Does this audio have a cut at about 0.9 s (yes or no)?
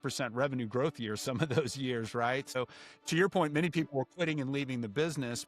no